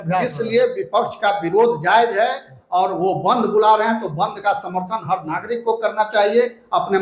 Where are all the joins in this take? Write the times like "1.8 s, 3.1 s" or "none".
none